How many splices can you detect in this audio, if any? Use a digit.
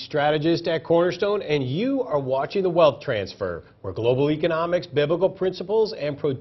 0